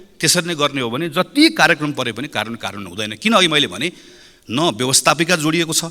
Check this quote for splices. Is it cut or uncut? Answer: uncut